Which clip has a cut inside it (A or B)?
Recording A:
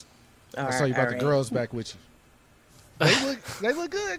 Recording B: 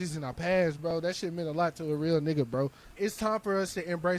B